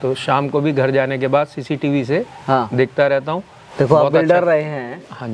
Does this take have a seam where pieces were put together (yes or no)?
yes